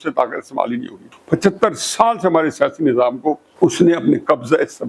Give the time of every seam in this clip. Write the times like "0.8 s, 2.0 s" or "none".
1.1 s, 3.5 s